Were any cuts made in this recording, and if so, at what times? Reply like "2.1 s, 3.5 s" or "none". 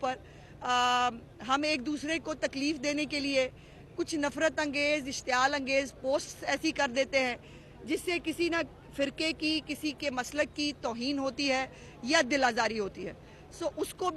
none

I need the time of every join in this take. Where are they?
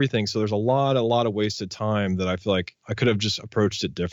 2.8 s

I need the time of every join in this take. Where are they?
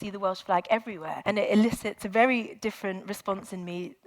1.1 s, 2.0 s

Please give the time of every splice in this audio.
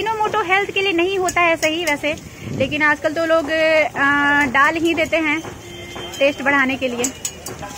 none

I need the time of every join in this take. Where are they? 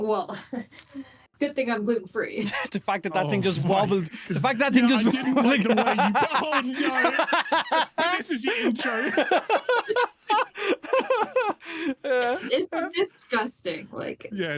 none

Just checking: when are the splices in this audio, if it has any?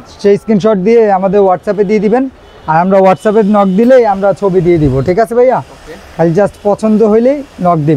none

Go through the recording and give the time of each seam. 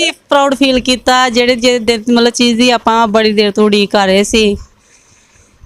none

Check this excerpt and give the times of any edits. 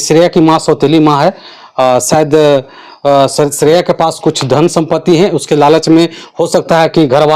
none

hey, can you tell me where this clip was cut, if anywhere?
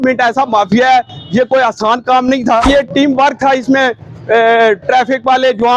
2.7 s

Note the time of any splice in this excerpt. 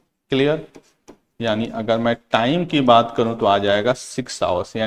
none

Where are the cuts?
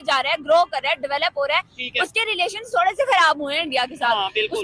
none

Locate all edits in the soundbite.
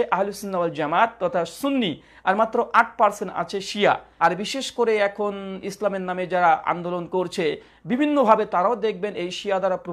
4.1 s

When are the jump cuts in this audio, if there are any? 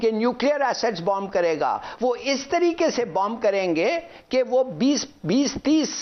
none

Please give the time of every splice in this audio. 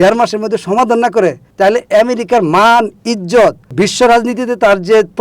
3.7 s

